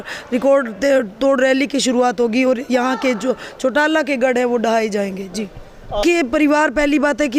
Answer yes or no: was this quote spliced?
yes